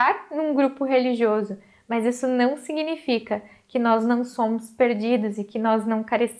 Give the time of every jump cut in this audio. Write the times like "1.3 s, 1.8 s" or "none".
none